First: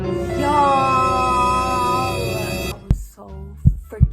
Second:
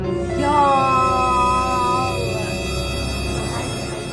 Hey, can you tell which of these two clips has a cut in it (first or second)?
first